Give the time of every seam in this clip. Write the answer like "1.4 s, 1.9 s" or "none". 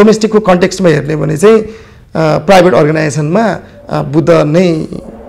none

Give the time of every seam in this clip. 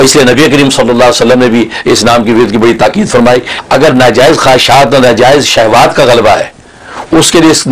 3.5 s

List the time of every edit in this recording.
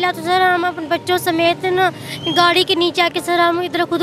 none

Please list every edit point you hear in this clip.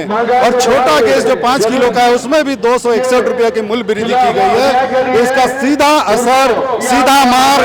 none

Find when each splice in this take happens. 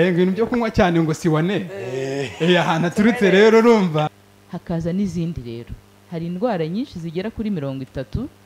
4.1 s

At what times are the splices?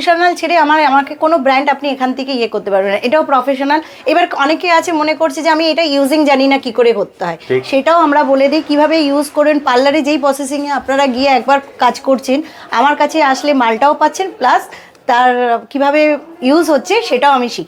none

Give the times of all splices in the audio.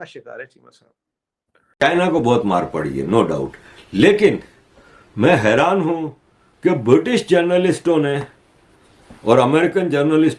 1.6 s

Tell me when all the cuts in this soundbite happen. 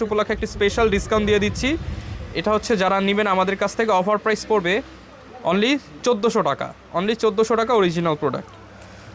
none

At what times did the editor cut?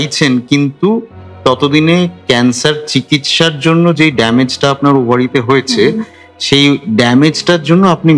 none

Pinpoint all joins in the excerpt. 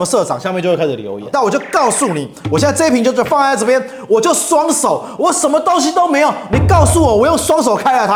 none

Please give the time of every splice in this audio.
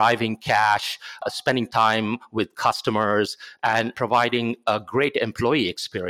1.2 s, 3.9 s

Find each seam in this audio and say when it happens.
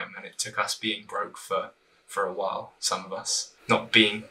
3.3 s

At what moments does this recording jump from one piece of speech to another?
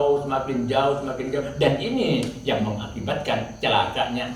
none

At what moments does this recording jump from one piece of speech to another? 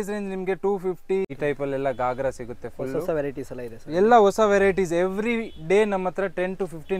1.3 s

